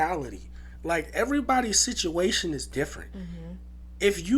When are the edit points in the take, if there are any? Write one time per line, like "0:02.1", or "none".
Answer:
none